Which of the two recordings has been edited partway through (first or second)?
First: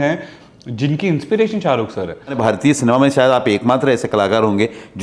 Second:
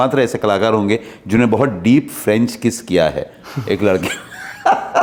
first